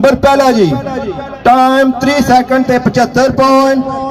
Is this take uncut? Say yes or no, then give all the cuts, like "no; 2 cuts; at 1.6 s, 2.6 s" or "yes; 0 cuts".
no; 1 cut; at 1.2 s